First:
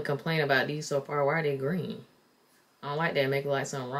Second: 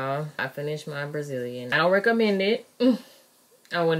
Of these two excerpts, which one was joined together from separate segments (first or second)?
second